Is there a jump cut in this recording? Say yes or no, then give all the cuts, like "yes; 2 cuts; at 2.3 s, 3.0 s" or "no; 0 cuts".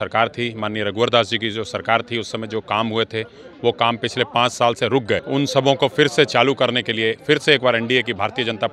no; 0 cuts